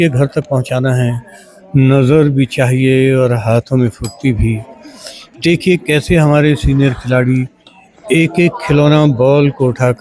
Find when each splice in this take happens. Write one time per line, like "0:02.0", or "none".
none